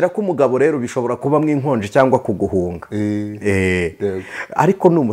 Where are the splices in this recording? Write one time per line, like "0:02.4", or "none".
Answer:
none